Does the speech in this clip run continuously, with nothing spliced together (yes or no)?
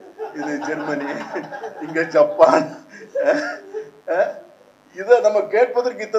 yes